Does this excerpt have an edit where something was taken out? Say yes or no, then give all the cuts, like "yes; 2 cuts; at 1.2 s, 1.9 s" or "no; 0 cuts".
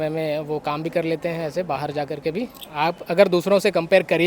yes; 1 cut; at 2.6 s